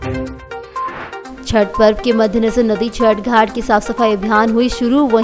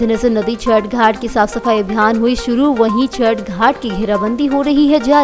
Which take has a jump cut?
first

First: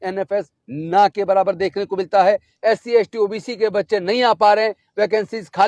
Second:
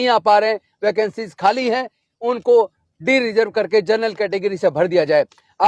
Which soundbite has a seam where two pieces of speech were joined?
first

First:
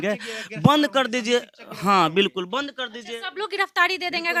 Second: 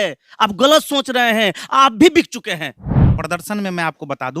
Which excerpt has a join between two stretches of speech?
second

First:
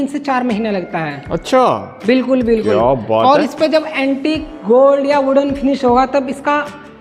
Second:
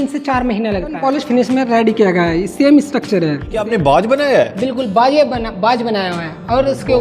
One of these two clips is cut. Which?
second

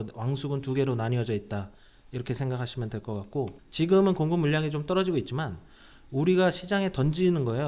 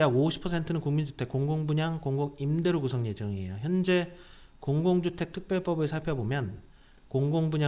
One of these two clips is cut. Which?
first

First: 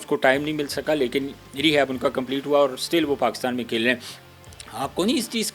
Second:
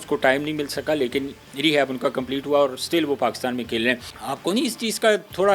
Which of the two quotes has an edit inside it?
second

